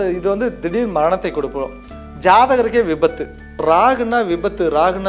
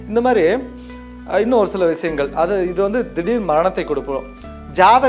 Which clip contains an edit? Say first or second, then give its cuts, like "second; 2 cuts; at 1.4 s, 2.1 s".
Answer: first; 1 cut; at 3.6 s